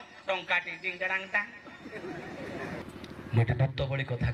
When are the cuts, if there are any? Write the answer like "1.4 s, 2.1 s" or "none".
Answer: 2.8 s